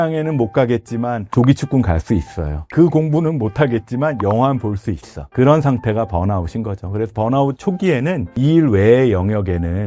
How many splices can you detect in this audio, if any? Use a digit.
0